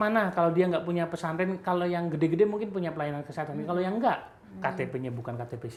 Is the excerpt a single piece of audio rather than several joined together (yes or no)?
yes